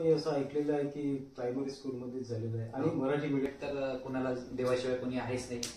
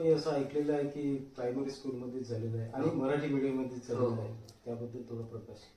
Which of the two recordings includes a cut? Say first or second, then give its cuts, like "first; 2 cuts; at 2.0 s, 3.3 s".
first; 1 cut; at 3.5 s